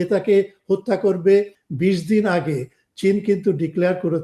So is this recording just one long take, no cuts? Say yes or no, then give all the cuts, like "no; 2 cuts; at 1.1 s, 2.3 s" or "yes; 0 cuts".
no; 1 cut; at 1.6 s